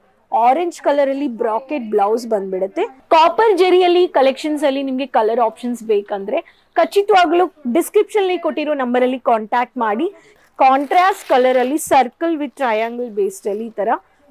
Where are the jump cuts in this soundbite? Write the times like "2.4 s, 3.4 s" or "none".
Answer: 3.0 s, 10.3 s

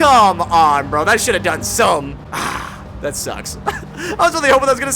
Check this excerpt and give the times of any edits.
2.2 s

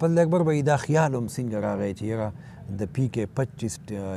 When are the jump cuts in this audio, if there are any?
none

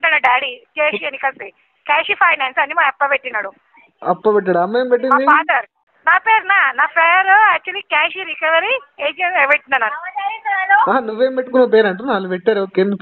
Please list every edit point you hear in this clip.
5.8 s

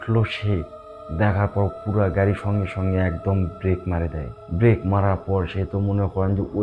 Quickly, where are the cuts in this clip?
none

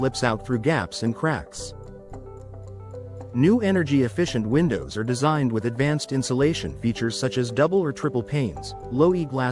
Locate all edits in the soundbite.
1.4 s, 3.0 s

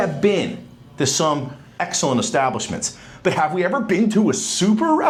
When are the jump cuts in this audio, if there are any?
none

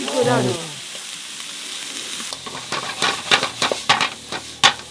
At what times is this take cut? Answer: 2.3 s

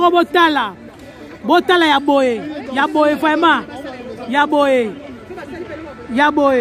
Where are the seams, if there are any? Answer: none

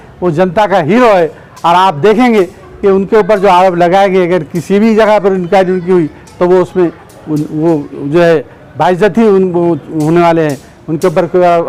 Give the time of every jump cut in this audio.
none

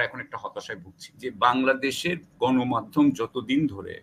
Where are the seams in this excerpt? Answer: 1.2 s

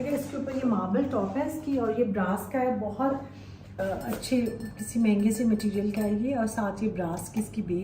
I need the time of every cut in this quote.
3.7 s

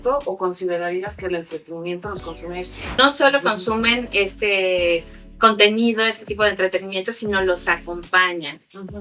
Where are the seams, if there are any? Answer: 3.0 s

